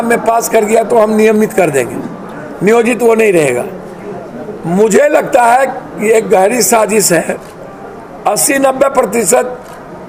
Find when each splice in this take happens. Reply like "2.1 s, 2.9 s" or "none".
none